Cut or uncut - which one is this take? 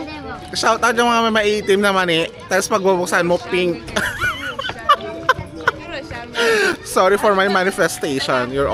uncut